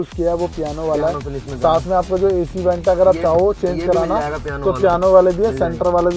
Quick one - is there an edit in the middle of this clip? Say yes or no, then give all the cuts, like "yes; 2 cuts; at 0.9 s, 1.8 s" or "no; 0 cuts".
no; 0 cuts